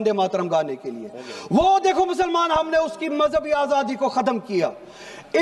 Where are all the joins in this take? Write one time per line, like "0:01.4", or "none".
none